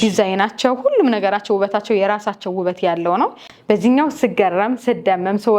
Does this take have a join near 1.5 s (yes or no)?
no